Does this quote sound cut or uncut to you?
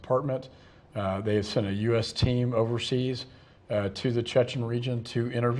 cut